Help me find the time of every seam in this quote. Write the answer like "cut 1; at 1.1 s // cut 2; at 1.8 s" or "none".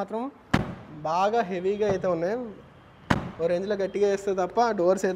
none